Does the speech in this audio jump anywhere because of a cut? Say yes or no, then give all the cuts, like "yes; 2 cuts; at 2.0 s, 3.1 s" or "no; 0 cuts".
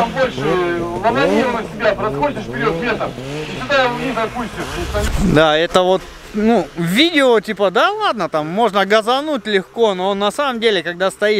no; 0 cuts